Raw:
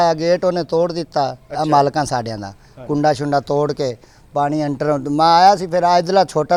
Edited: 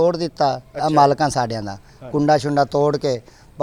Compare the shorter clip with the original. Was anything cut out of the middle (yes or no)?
no